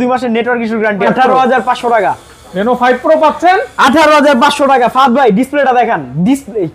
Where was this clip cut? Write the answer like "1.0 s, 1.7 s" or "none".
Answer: 1.1 s